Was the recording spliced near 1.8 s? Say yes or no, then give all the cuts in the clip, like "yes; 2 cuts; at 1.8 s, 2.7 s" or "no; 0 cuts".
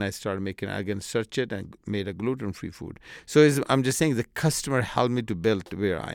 no; 0 cuts